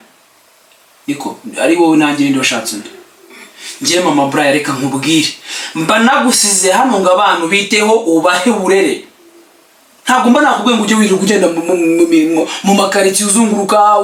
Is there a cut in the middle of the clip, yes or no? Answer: no